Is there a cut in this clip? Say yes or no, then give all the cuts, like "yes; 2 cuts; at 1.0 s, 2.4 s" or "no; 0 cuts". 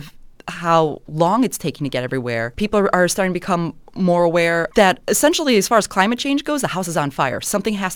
yes; 2 cuts; at 2.5 s, 4.7 s